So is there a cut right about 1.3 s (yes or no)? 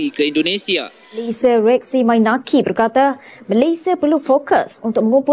yes